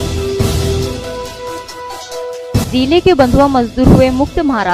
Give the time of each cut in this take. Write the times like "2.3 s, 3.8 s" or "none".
1.0 s